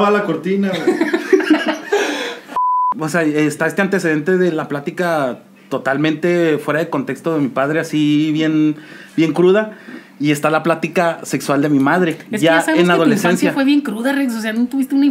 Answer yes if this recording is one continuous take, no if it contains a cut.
no